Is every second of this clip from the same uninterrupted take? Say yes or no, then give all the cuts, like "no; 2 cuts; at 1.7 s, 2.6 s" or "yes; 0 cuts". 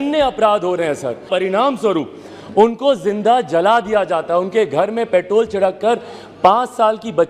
no; 1 cut; at 1.3 s